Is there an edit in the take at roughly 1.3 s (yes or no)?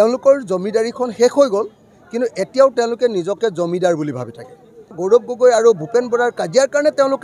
no